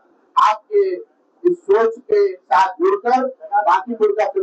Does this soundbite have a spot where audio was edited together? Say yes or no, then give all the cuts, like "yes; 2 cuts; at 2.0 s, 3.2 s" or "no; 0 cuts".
no; 0 cuts